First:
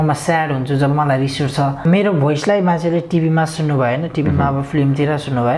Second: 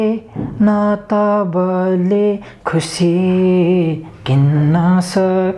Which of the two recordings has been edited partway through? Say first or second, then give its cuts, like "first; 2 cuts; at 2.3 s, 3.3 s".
first; 1 cut; at 1.9 s